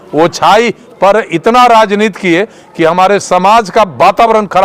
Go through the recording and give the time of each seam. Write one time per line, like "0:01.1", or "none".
none